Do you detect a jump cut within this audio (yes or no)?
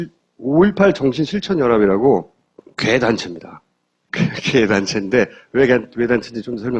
no